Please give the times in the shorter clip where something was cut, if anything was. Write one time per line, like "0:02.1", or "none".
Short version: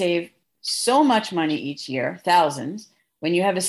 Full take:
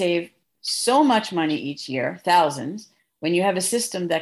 none